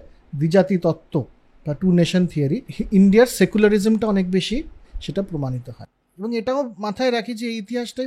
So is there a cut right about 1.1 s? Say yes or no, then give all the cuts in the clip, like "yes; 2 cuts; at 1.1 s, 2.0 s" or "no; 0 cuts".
no; 3 cuts; at 2.7 s, 4.9 s, 5.8 s